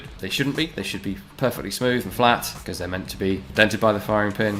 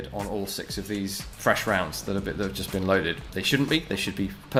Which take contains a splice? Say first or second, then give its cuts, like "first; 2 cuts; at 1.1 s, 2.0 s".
first; 1 cut; at 3.4 s